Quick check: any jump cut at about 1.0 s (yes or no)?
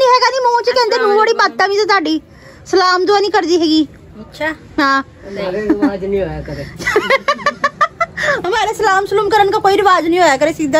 yes